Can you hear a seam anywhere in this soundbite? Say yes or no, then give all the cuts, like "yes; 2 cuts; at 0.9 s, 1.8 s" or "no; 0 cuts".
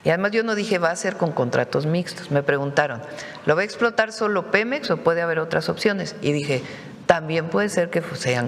no; 0 cuts